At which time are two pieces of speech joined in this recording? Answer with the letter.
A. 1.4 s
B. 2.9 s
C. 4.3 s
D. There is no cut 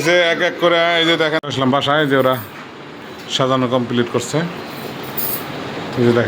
A